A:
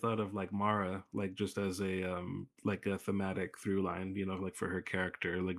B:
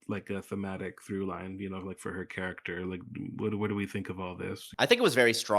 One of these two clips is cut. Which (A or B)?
B